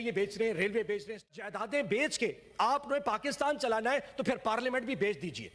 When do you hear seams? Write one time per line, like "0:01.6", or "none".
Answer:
0:01.3